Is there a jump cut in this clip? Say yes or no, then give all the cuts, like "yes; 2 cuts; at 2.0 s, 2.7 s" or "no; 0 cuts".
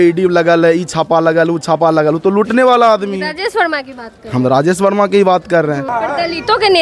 yes; 1 cut; at 5.9 s